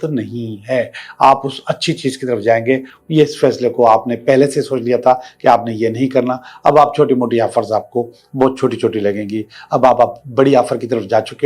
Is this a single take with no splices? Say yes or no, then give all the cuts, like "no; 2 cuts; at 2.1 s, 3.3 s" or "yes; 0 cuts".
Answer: yes; 0 cuts